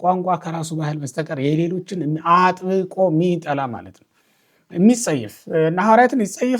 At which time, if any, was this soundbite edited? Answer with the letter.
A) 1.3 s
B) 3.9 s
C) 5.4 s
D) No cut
D